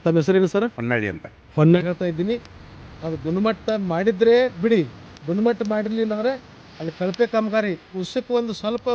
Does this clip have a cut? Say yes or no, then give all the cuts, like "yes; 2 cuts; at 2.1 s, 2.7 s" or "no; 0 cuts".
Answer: yes; 1 cut; at 1.8 s